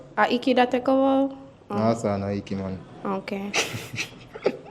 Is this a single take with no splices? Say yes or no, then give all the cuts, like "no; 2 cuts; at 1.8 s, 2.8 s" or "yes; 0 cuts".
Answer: yes; 0 cuts